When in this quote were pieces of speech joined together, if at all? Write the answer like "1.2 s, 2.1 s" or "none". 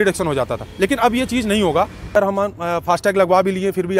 2.1 s